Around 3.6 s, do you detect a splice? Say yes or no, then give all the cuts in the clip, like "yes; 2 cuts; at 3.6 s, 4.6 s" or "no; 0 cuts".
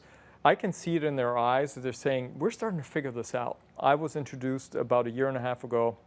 yes; 1 cut; at 3.6 s